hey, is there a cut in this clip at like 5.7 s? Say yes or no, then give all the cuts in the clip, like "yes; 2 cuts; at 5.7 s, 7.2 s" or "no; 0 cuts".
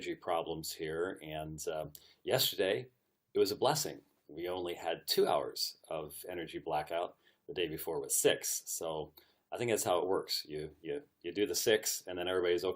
no; 1 cut; at 1.7 s